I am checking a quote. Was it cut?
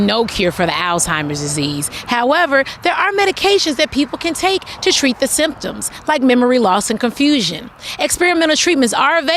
no; 0 cuts

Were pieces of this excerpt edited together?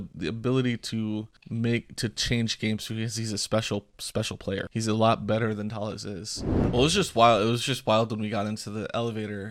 yes; 3 cuts; at 1.4 s, 4.7 s, 6.6 s

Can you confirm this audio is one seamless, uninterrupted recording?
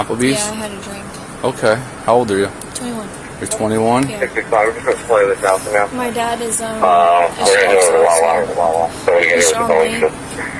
yes; 0 cuts

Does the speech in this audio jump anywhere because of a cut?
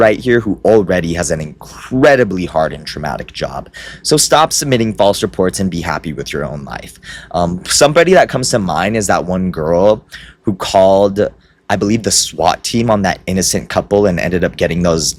no; 0 cuts

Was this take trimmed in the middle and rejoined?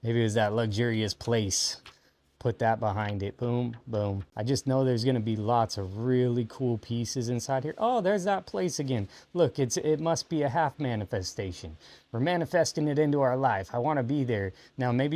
yes; 1 cut; at 4.2 s

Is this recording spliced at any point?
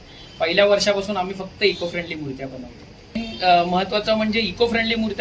yes; 1 cut; at 3.2 s

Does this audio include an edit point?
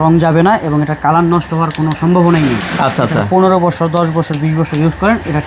no; 0 cuts

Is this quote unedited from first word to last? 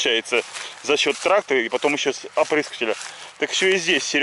yes; 0 cuts

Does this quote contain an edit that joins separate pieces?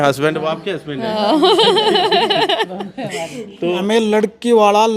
yes; 1 cut; at 3.8 s

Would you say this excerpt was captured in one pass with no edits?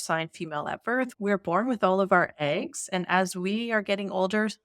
no; 1 cut; at 1.1 s

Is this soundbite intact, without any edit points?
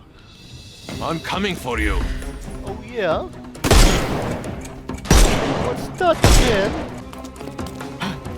no; 1 cut; at 7.0 s

